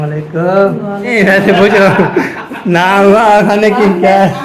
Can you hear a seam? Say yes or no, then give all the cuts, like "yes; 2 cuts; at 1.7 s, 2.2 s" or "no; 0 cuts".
yes; 1 cut; at 1.1 s